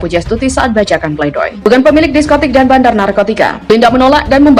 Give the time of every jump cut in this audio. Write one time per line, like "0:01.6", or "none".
0:01.7